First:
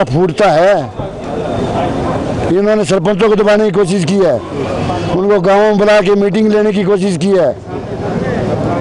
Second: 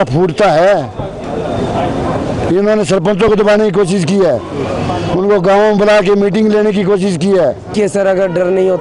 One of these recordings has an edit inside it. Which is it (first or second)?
second